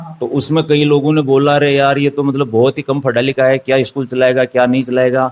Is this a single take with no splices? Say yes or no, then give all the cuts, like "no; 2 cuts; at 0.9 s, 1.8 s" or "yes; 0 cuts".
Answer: yes; 0 cuts